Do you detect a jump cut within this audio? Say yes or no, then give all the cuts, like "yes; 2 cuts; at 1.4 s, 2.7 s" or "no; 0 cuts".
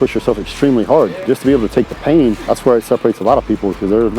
yes; 2 cuts; at 1.2 s, 2.4 s